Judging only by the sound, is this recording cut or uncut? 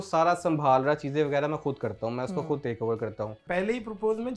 cut